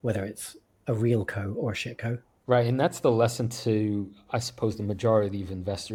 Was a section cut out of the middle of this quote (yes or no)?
no